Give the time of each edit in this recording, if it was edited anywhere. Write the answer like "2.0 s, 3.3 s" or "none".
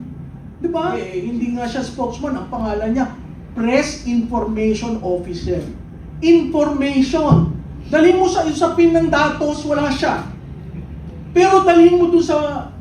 1.1 s